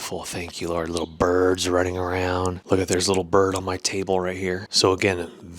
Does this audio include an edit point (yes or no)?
yes